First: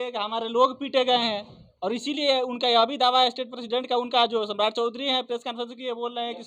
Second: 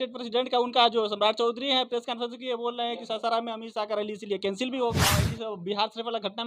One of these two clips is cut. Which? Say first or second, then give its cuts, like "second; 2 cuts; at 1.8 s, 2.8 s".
second; 1 cut; at 5.2 s